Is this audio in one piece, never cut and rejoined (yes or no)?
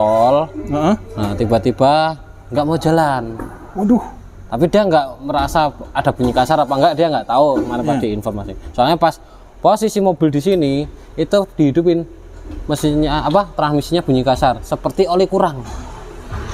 yes